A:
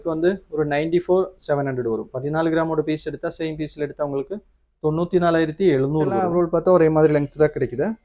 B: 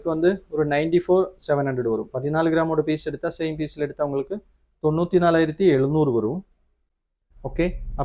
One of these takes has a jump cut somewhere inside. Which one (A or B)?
A